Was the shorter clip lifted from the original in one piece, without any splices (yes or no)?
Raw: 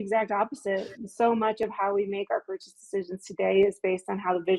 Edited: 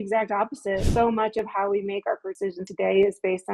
no